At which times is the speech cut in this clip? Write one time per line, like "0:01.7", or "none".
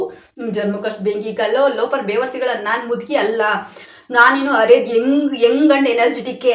none